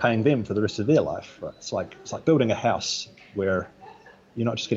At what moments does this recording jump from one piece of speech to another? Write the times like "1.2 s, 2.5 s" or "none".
none

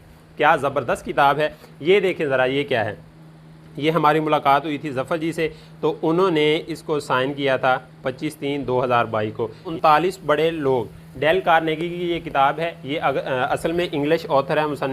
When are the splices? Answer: 1.7 s, 9.7 s

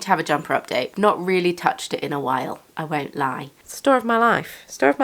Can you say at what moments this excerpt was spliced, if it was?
0.9 s, 3.6 s

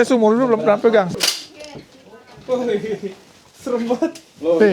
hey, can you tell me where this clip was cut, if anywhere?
1.2 s

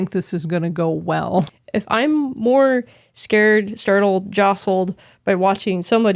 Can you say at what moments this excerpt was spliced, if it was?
1.5 s

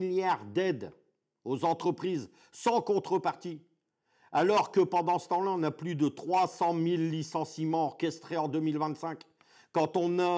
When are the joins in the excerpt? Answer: none

